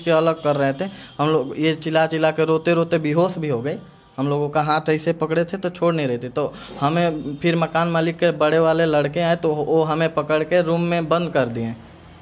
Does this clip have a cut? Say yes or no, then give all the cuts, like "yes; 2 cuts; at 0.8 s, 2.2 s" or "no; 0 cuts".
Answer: no; 0 cuts